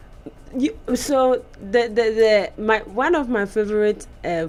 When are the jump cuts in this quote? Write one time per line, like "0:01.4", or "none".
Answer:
none